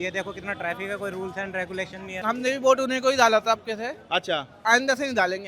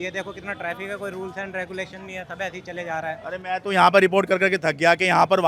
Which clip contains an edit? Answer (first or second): first